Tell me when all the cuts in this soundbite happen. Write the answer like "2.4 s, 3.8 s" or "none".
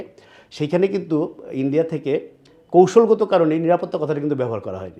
none